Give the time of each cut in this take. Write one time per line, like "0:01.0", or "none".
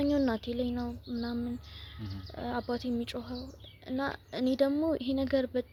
none